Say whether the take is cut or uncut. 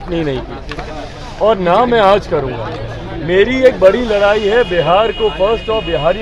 uncut